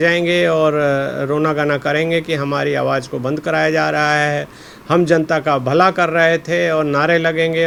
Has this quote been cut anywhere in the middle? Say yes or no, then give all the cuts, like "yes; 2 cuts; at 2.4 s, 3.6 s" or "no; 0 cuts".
no; 0 cuts